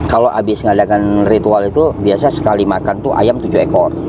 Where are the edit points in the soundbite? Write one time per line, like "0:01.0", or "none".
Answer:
none